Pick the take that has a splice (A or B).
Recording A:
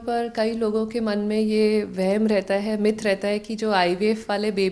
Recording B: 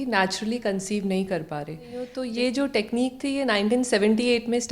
B